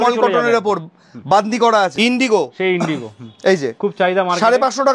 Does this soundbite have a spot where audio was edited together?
yes; 1 cut; at 1.9 s

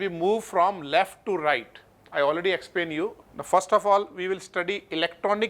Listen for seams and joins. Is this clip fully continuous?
no; 1 cut; at 3.2 s

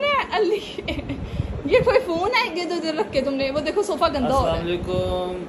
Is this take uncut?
yes; 0 cuts

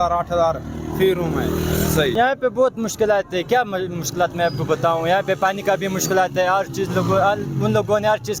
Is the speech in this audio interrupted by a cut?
no; 0 cuts

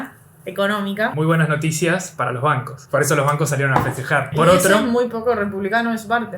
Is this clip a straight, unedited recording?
no; 3 cuts; at 1.1 s, 2.7 s, 4.3 s

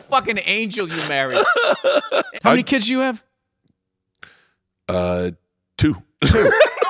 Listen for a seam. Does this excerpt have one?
yes; 1 cut; at 2.3 s

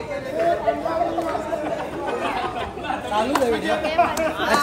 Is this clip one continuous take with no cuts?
yes; 0 cuts

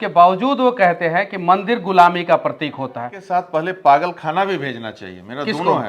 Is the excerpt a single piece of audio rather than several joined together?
no; 1 cut; at 3.1 s

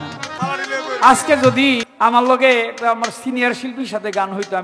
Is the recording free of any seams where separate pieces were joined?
no; 1 cut; at 1.9 s

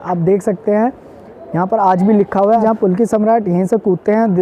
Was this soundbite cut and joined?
yes; 1 cut; at 2.6 s

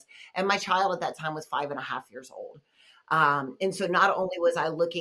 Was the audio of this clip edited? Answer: no; 0 cuts

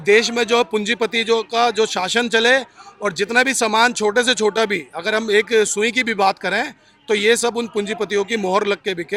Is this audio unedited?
yes; 0 cuts

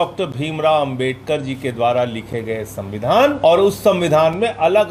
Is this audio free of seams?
no; 1 cut; at 3.4 s

